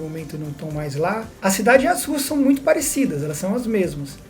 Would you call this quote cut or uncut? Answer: cut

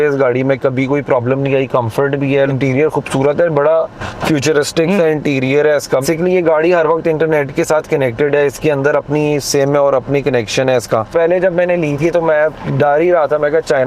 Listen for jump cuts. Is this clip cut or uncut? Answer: cut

